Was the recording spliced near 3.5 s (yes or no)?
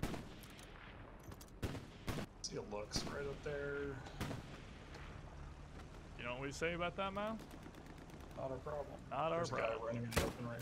no